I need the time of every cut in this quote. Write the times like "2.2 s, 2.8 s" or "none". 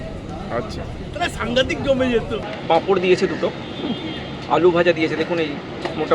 2.5 s